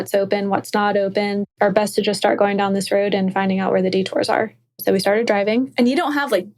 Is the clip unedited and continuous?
no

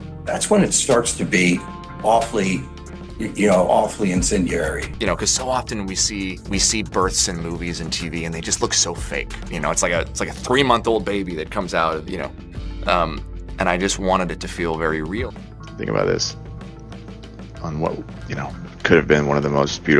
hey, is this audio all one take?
no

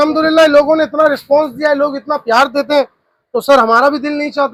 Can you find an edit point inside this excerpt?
no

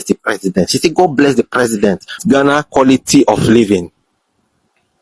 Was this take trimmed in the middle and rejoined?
yes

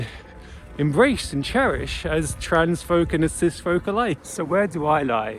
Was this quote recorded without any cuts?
no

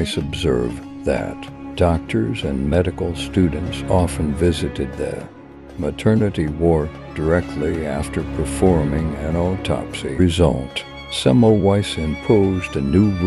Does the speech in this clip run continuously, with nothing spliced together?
no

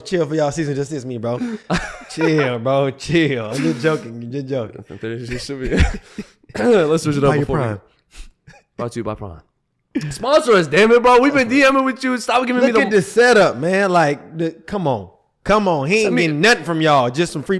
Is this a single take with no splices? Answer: yes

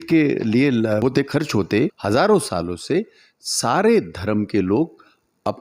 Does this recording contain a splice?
yes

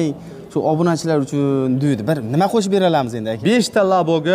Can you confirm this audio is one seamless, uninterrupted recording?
no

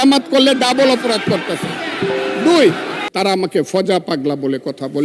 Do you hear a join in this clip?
yes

